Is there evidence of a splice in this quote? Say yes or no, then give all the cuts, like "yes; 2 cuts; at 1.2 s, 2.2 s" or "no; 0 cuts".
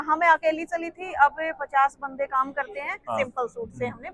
yes; 1 cut; at 2.9 s